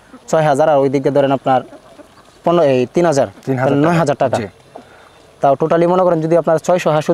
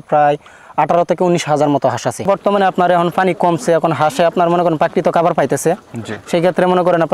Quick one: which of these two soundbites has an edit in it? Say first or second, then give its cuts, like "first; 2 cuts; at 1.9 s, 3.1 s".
second; 1 cut; at 2.2 s